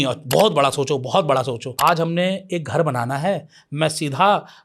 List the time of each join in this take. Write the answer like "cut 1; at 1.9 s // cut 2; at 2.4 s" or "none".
cut 1; at 1.6 s